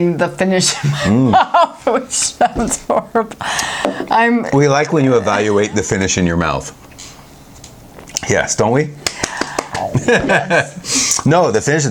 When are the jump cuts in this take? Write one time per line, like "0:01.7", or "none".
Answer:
none